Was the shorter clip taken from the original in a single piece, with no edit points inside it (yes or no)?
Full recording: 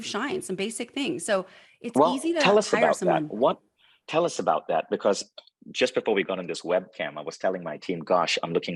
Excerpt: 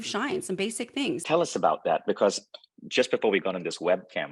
no